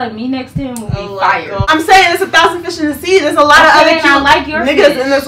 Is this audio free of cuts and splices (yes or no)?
no